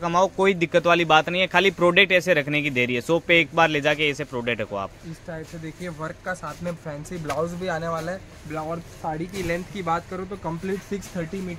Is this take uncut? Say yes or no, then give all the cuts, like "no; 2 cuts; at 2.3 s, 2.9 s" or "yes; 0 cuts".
yes; 0 cuts